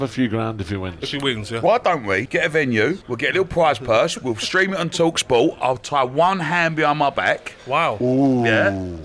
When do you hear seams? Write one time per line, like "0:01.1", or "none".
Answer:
0:02.3
0:03.1